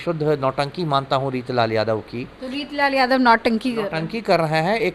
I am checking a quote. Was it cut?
no; 0 cuts

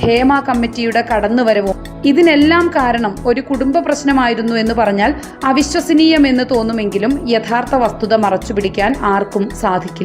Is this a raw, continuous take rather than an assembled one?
no; 1 cut; at 1.8 s

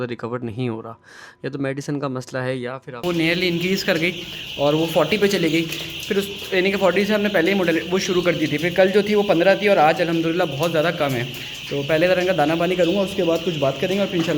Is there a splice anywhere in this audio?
yes; 1 cut; at 3.0 s

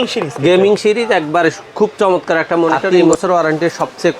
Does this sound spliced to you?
yes; 1 cut; at 2.9 s

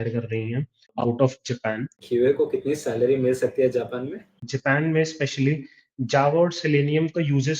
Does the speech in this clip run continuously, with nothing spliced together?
no; 3 cuts; at 0.9 s, 2.0 s, 4.5 s

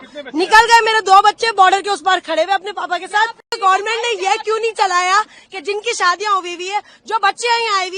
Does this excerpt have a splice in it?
yes; 1 cut; at 3.6 s

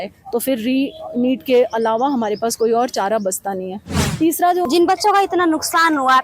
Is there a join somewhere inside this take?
yes; 1 cut; at 4.6 s

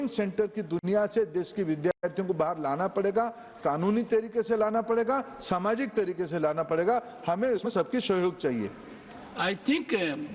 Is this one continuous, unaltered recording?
yes; 0 cuts

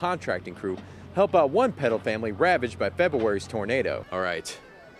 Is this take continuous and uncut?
no; 1 cut; at 4.1 s

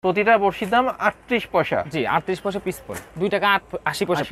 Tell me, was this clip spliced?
yes; 1 cut; at 3.0 s

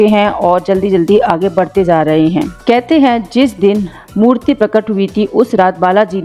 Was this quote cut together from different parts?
no; 0 cuts

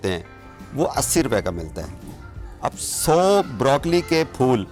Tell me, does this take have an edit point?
no; 0 cuts

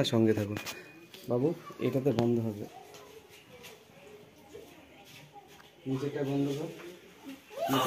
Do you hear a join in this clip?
no; 0 cuts

